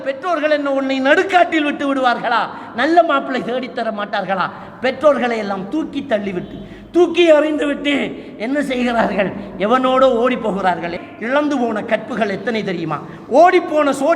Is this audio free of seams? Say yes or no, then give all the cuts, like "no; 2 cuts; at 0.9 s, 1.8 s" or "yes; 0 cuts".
no; 1 cut; at 10.9 s